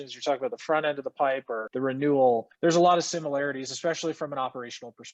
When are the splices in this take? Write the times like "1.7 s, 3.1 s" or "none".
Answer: 1.6 s, 2.5 s